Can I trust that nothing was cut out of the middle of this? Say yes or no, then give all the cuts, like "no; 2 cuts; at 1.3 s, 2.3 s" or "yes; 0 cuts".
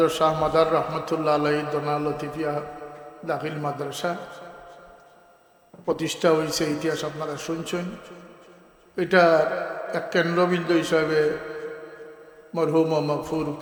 yes; 0 cuts